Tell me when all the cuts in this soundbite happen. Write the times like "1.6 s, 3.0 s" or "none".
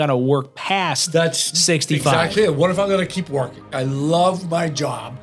3.7 s